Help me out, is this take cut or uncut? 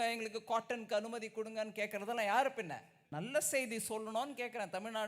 cut